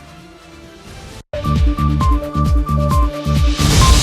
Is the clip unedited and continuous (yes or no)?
no